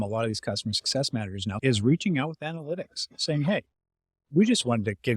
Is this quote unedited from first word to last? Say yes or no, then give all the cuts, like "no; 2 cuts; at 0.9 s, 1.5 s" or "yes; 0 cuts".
no; 1 cut; at 1.5 s